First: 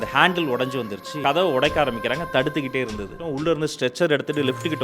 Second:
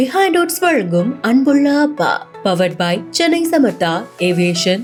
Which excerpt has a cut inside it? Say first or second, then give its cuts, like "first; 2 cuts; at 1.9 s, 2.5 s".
first; 2 cuts; at 1.2 s, 3.2 s